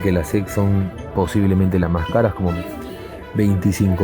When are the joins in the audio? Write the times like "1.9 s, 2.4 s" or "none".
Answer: 3.0 s